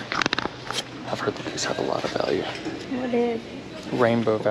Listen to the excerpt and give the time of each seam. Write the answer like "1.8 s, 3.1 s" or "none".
2.8 s

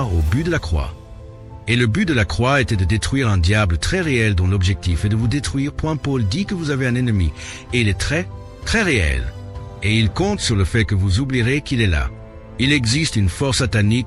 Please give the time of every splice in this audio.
none

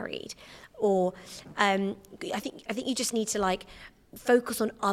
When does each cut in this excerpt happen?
none

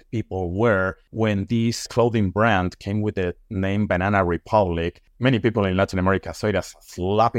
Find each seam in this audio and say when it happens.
1.0 s, 5.0 s

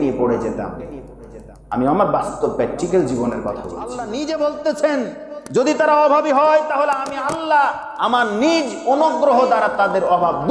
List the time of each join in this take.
4.1 s

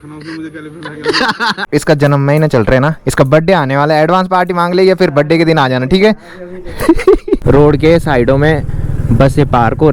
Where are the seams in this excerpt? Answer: 1.6 s, 7.4 s

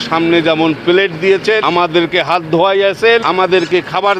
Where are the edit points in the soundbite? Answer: 1.6 s, 3.2 s

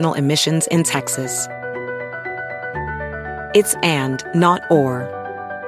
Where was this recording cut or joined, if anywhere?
none

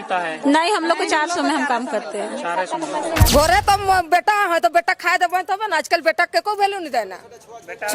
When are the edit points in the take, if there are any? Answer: 3.3 s

